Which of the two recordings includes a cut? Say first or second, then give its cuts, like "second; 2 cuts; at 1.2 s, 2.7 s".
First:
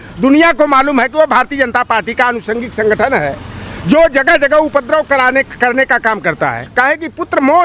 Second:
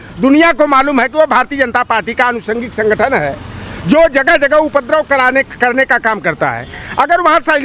first; 1 cut; at 6.6 s